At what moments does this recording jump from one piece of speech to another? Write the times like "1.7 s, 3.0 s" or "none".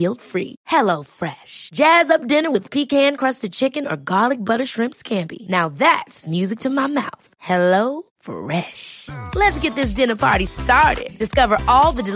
none